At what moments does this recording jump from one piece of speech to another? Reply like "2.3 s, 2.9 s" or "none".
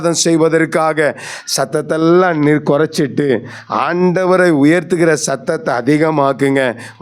none